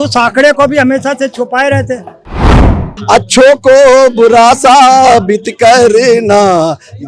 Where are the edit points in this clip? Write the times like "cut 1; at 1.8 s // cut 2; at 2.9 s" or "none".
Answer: cut 1; at 2.7 s